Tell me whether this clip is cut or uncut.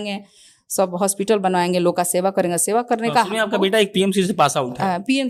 uncut